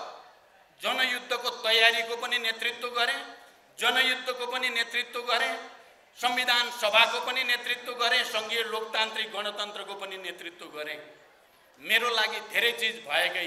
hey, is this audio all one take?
yes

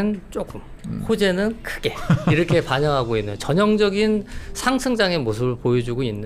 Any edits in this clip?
no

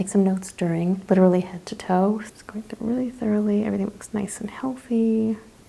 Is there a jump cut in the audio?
yes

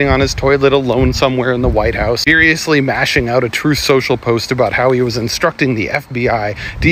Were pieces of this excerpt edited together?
no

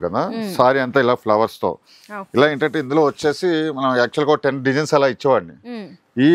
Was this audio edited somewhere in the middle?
no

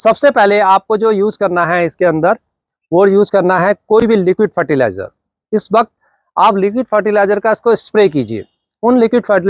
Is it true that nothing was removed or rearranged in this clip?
yes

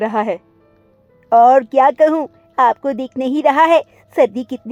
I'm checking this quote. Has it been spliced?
no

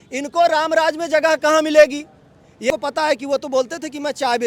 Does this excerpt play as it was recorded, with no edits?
no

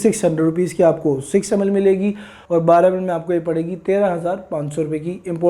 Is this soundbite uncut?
no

